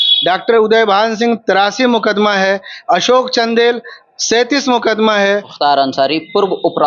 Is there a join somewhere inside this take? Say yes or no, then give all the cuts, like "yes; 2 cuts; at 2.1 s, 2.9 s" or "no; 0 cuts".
yes; 1 cut; at 5.5 s